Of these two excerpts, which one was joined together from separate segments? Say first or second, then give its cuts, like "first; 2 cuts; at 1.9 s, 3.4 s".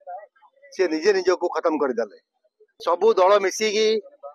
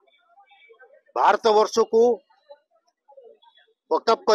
first; 1 cut; at 2.7 s